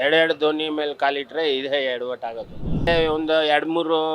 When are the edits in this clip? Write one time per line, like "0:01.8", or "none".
0:02.9